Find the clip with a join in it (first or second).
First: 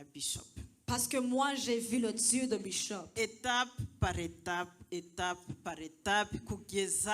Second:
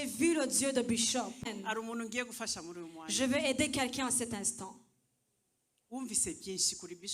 second